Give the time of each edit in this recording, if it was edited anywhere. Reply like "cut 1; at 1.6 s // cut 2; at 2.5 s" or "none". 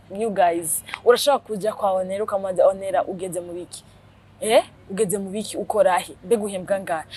none